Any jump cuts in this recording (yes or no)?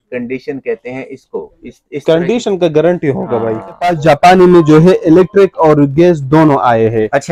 yes